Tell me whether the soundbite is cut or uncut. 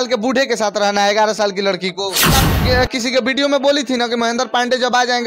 cut